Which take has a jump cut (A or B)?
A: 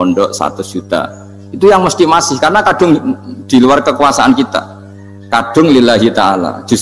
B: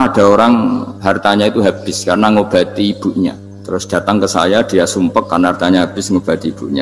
B